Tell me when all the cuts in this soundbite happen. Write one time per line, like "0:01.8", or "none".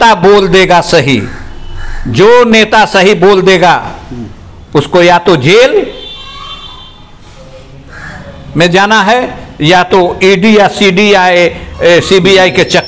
none